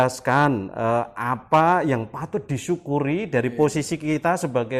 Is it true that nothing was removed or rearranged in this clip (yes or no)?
yes